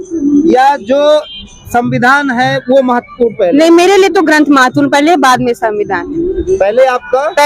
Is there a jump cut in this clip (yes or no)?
no